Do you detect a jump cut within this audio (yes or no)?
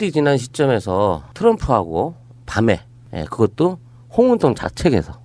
no